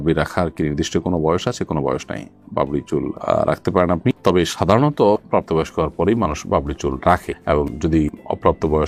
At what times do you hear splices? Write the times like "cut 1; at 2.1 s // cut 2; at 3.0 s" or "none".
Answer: none

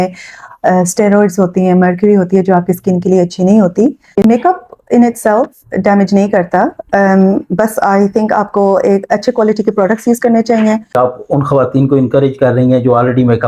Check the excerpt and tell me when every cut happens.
cut 1; at 4.2 s // cut 2; at 11.0 s

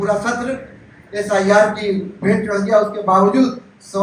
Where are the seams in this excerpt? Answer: none

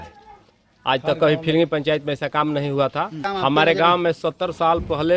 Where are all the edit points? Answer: cut 1; at 3.2 s

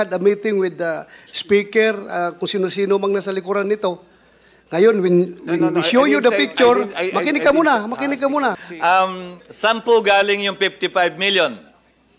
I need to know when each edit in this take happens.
cut 1; at 8.7 s

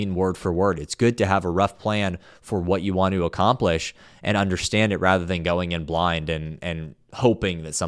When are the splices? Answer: none

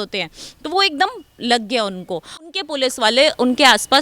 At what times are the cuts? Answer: cut 1; at 2.5 s

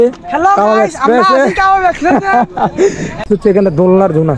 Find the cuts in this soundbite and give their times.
cut 1; at 3.2 s

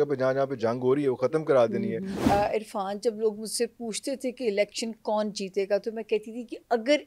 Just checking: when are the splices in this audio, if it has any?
cut 1; at 2.2 s

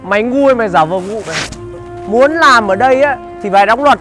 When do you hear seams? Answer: none

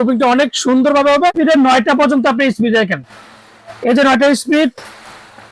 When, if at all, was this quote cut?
cut 1; at 1.3 s

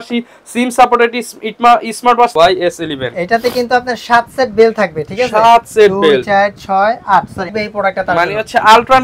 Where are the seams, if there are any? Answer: cut 1; at 2.3 s // cut 2; at 7.5 s

